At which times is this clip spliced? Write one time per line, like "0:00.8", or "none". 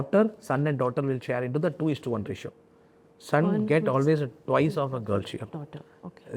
none